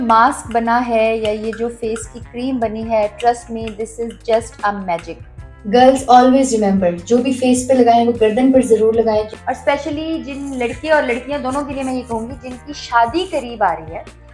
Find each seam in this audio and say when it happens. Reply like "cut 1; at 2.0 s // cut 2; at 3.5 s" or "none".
cut 1; at 5.5 s // cut 2; at 9.3 s

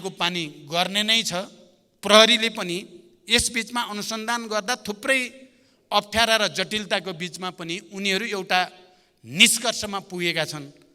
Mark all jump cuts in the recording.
none

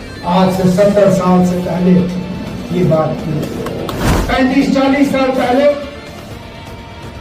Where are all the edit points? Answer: cut 1; at 4.2 s

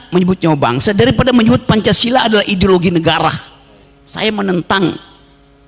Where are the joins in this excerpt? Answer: none

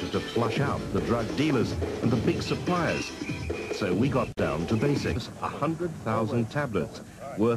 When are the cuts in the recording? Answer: none

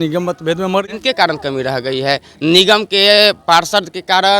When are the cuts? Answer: cut 1; at 0.9 s

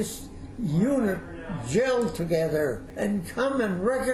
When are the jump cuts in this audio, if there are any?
cut 1; at 2.9 s

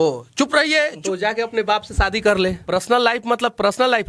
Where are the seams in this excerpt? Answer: cut 1; at 1.0 s // cut 2; at 2.6 s

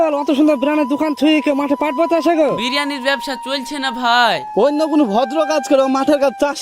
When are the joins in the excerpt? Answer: none

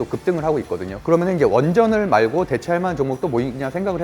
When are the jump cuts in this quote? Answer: cut 1; at 1.0 s

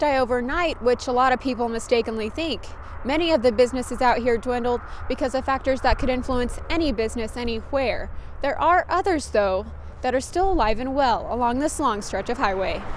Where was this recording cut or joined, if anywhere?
none

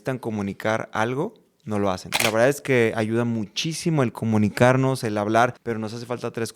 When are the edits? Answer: cut 1; at 2.1 s // cut 2; at 5.6 s

